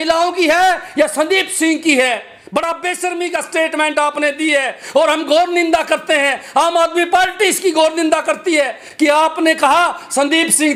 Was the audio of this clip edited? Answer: no; 0 cuts

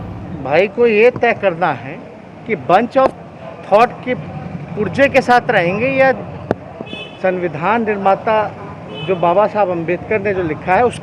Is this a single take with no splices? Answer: yes; 0 cuts

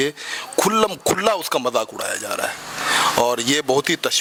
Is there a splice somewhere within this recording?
no; 0 cuts

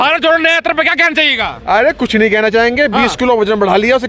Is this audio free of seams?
yes; 0 cuts

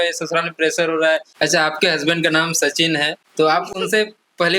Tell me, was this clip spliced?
yes; 2 cuts; at 1.3 s, 3.2 s

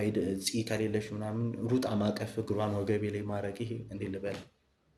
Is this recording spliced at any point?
no; 0 cuts

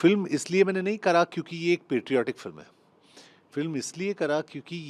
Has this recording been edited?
no; 0 cuts

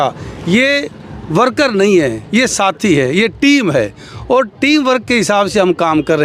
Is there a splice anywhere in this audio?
no; 0 cuts

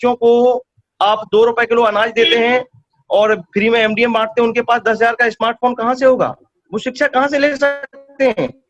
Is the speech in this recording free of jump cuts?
yes; 0 cuts

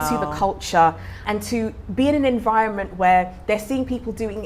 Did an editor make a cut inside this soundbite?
no; 0 cuts

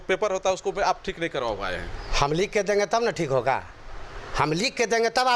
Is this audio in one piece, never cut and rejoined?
yes; 0 cuts

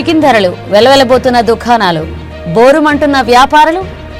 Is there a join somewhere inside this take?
no; 0 cuts

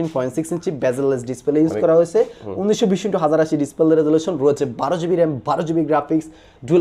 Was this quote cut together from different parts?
no; 0 cuts

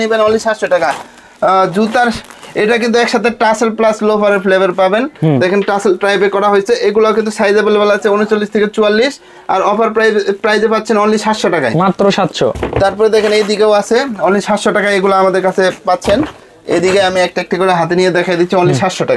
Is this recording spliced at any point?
no; 0 cuts

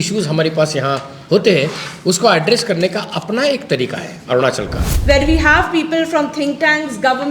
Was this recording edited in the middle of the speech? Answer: yes; 1 cut; at 4.9 s

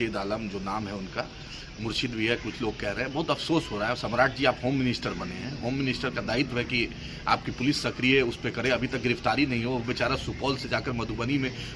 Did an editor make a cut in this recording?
no; 0 cuts

